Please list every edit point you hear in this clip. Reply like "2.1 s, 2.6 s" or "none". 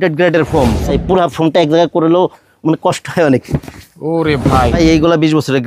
0.9 s, 4.8 s